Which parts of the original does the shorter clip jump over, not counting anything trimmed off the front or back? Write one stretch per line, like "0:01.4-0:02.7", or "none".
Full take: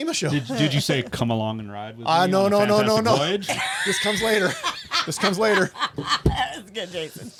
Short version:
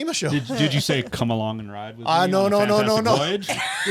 none